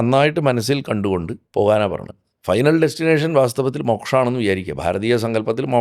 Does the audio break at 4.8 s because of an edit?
no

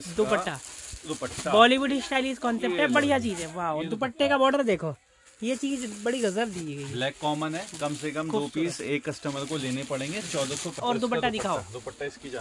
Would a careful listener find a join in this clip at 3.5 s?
no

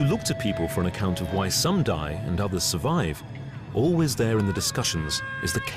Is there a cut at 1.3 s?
no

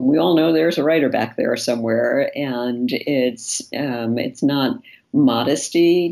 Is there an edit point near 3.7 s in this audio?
no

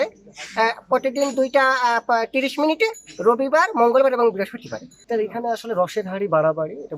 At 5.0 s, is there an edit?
yes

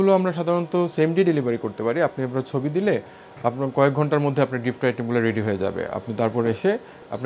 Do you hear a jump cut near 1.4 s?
no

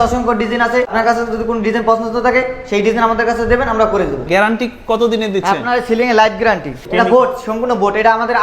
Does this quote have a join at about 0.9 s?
yes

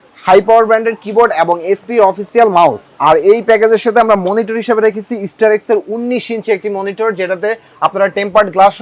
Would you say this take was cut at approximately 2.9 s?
no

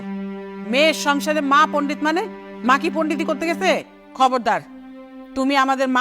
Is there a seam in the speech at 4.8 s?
no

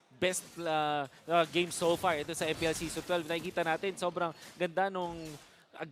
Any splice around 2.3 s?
no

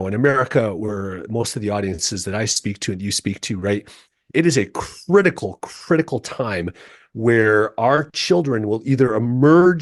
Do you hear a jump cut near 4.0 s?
no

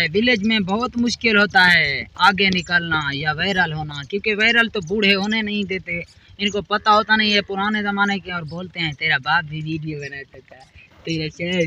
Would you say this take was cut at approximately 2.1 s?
no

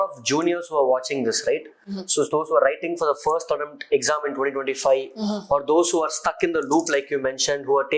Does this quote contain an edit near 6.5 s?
no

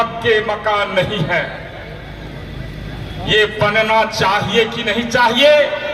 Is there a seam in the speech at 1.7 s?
no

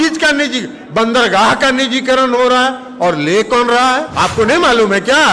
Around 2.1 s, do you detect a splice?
no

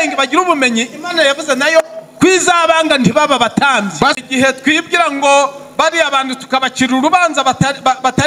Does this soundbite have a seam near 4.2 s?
yes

